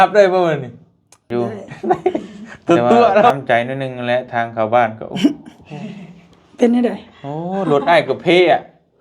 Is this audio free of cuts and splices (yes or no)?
no